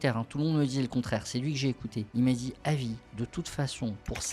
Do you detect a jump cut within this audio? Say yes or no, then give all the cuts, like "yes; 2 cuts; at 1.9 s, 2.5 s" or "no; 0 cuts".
yes; 2 cuts; at 2.0 s, 3.1 s